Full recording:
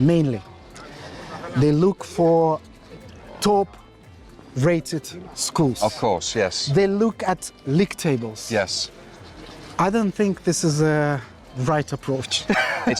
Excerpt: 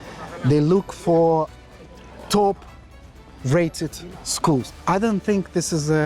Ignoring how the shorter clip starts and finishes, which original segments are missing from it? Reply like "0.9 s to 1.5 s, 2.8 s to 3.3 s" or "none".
5.8 s to 9.6 s